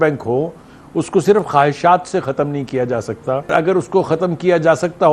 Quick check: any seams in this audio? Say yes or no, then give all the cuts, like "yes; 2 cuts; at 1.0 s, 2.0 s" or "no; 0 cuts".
yes; 1 cut; at 3.5 s